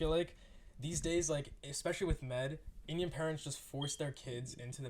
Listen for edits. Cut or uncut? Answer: uncut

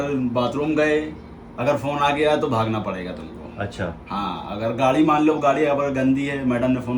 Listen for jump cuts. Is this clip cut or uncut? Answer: uncut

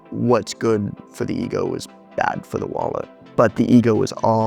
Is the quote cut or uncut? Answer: cut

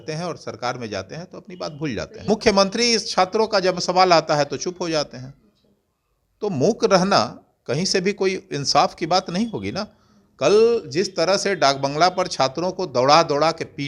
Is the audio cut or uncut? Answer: cut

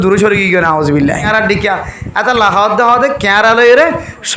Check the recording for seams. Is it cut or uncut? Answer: cut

